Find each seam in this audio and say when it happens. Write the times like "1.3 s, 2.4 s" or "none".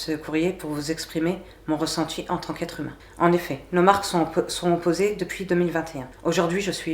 3.0 s, 6.0 s